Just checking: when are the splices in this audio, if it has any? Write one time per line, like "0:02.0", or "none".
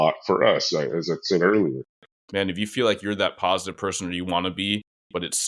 0:01.9